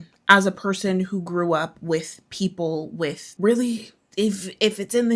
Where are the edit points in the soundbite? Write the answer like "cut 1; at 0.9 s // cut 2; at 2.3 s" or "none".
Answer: none